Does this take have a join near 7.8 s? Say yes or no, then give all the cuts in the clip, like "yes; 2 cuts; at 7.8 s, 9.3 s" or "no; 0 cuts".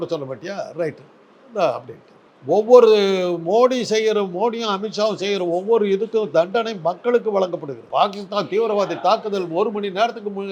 yes; 1 cut; at 7.8 s